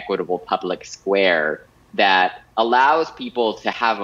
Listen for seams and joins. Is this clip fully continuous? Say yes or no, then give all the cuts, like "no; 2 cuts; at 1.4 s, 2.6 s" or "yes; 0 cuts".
yes; 0 cuts